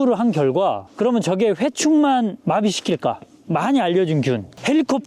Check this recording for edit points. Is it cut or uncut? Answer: cut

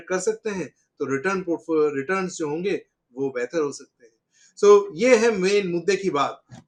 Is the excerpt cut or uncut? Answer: uncut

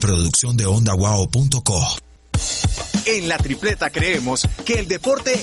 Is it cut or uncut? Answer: cut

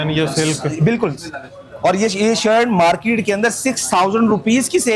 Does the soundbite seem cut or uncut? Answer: uncut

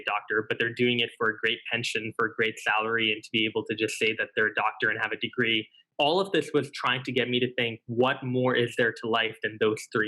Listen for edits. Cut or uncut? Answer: cut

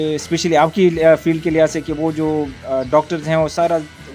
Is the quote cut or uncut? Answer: uncut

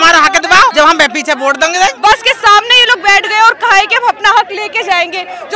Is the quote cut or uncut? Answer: cut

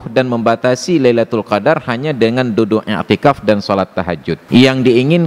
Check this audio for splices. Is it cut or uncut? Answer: cut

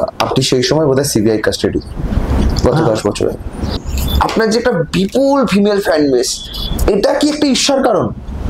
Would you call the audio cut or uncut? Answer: cut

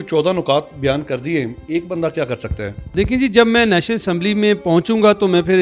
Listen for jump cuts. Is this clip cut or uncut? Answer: cut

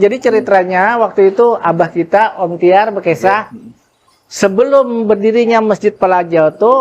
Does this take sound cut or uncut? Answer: uncut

